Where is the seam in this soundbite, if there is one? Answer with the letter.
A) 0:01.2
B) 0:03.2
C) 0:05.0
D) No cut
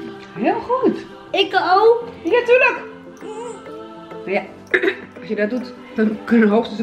D